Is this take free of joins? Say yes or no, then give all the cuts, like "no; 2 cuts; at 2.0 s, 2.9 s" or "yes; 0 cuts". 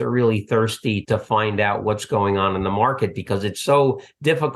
no; 1 cut; at 1.0 s